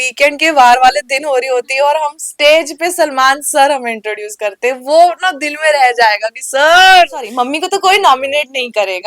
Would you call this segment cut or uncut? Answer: cut